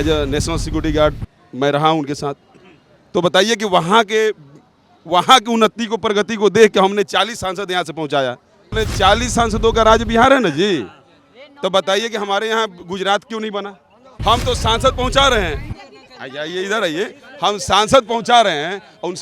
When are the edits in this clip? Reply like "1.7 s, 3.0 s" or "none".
8.7 s, 14.1 s